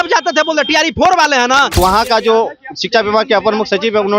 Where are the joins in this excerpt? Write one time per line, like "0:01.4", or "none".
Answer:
0:01.8